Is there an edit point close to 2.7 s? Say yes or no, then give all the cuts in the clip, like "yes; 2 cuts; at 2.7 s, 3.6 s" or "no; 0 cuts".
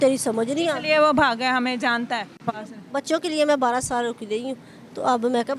yes; 1 cut; at 2.7 s